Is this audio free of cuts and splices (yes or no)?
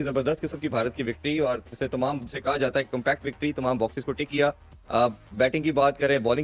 yes